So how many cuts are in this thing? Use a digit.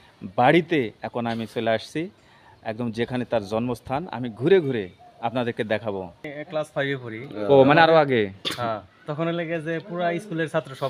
1